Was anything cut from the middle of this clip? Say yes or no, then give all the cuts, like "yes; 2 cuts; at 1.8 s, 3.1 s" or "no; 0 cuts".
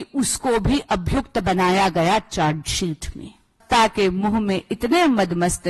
yes; 1 cut; at 3.6 s